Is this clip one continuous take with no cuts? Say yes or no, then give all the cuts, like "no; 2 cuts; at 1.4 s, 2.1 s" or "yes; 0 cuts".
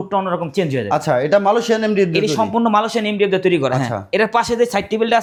yes; 0 cuts